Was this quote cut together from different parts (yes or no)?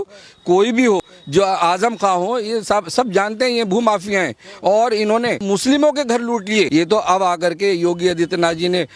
yes